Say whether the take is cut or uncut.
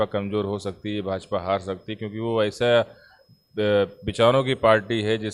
uncut